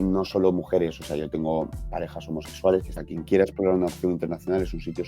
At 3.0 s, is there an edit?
yes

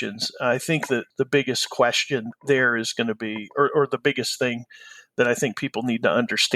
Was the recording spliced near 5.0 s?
no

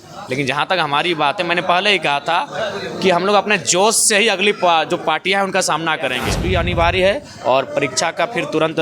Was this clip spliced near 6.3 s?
yes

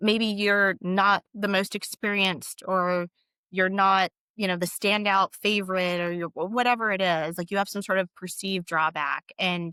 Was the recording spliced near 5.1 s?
no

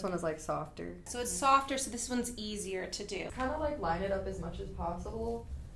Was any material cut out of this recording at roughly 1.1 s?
yes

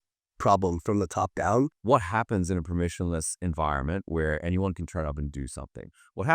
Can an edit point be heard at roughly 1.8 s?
yes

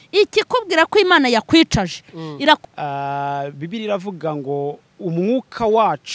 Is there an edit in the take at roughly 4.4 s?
no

